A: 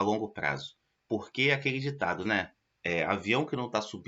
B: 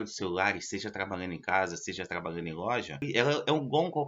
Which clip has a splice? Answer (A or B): B